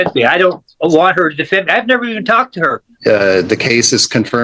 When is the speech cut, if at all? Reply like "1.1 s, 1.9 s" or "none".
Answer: 2.9 s

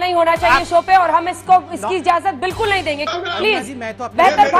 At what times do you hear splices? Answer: 3.1 s

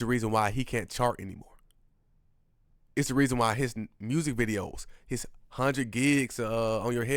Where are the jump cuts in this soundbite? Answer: none

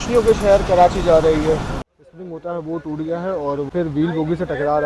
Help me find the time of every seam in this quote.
1.9 s, 3.7 s

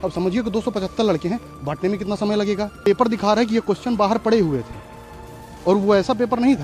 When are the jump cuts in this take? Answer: 2.8 s

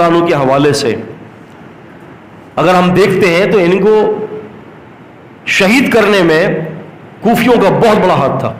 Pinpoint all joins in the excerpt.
none

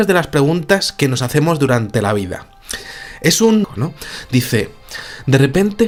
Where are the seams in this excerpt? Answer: none

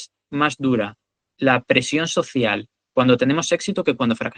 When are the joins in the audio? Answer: none

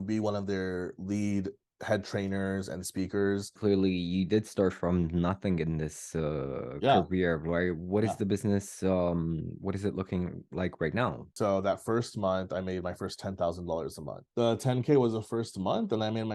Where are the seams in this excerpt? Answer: 3.6 s, 11.3 s, 14.2 s

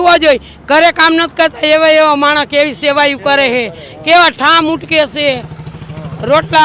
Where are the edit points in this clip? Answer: none

